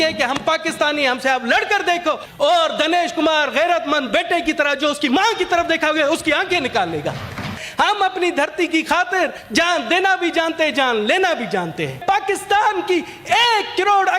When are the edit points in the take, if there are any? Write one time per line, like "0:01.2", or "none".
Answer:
0:02.3
0:07.6
0:09.4
0:12.0